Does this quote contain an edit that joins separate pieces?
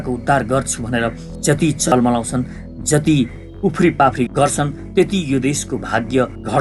yes; 1 cut; at 1.2 s

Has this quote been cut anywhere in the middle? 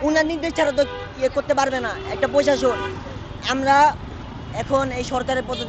no; 0 cuts

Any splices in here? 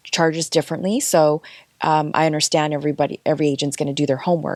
no; 0 cuts

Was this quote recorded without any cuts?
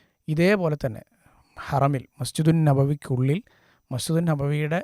yes; 0 cuts

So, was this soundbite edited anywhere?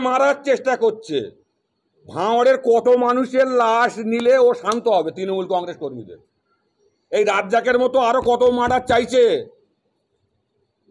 no; 0 cuts

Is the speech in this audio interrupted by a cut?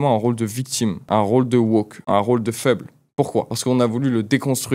yes; 3 cuts; at 1.0 s, 2.0 s, 3.5 s

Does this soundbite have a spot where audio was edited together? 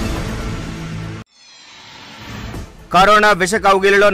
yes; 2 cuts; at 1.1 s, 2.2 s

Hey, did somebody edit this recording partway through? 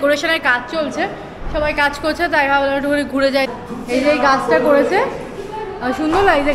yes; 1 cut; at 3.5 s

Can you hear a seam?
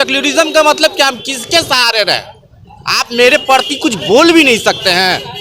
no; 0 cuts

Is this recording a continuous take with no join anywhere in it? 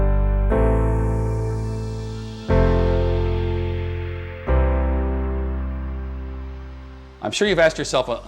no; 1 cut; at 7.0 s

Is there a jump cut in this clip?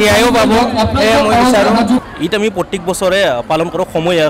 yes; 1 cut; at 2.1 s

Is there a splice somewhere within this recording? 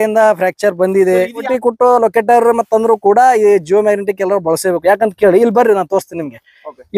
yes; 1 cut; at 1.5 s

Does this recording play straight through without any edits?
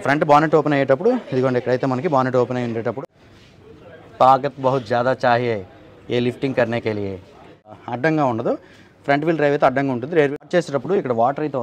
no; 3 cuts; at 3.0 s, 7.8 s, 10.4 s

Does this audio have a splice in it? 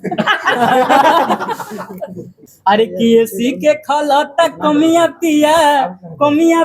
yes; 1 cut; at 2.5 s

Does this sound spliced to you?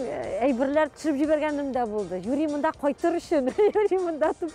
no; 0 cuts

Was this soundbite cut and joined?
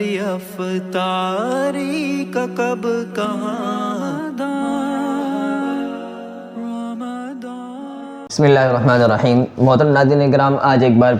yes; 1 cut; at 8.2 s

